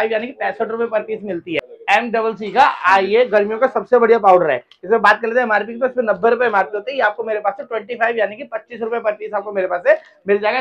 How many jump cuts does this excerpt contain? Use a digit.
1